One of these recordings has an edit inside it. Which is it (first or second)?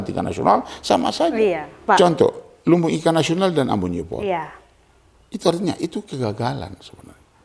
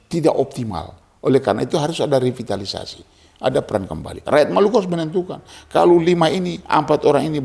first